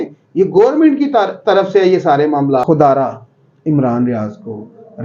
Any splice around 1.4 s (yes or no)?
no